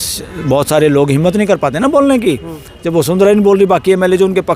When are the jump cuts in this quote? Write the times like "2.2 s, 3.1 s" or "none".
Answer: none